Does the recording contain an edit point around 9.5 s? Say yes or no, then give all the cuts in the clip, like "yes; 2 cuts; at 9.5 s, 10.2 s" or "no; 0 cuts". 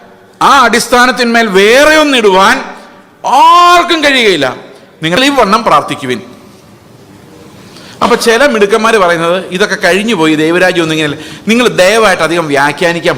no; 1 cut; at 5.2 s